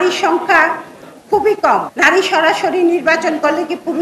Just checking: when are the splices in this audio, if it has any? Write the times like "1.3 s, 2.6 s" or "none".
1.9 s